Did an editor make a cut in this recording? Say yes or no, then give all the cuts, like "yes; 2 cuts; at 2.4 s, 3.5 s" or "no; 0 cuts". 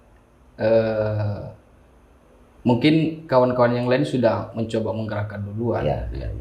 no; 0 cuts